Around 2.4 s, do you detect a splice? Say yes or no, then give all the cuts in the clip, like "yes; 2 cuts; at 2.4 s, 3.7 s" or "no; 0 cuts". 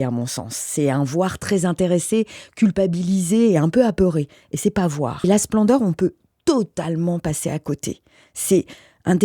no; 1 cut; at 5.2 s